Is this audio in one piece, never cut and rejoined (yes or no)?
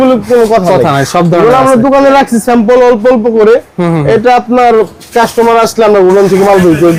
yes